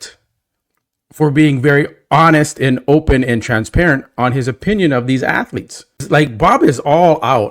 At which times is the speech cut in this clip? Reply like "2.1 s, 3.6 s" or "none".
6.0 s